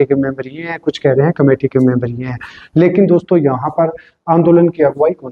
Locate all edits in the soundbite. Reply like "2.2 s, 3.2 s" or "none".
none